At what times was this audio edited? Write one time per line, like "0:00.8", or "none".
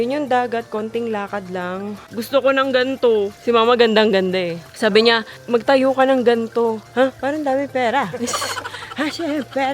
0:02.0
0:03.4
0:04.6